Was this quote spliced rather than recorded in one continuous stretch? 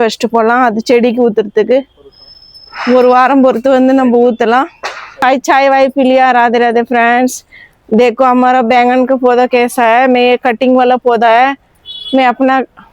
yes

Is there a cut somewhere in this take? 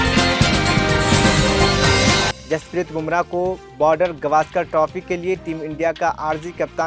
no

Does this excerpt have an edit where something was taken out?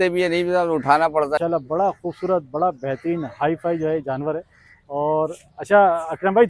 yes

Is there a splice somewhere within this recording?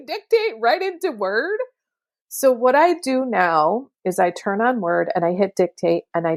no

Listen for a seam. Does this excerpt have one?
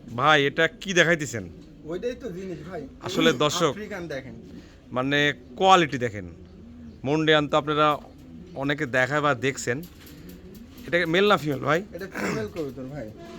no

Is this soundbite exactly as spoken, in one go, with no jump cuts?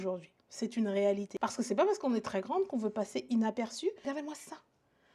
no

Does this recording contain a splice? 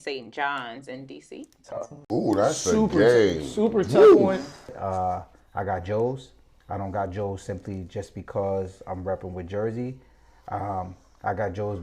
yes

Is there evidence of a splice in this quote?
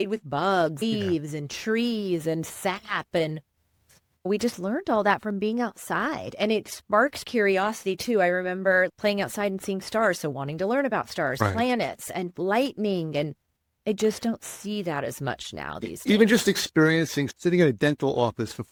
no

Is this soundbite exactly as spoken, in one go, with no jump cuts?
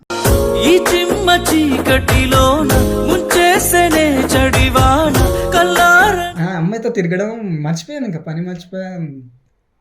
no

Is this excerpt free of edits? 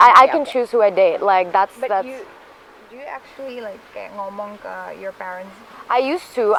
yes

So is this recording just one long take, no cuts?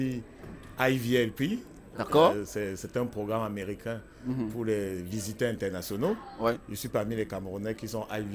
yes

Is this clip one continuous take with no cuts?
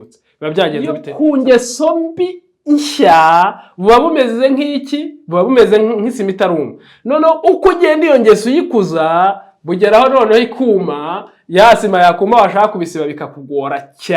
no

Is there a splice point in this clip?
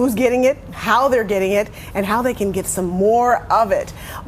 yes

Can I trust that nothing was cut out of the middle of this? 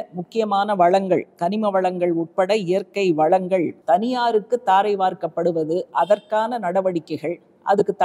no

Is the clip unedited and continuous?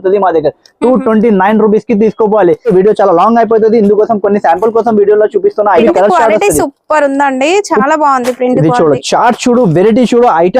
no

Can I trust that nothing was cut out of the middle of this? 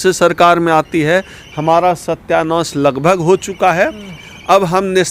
yes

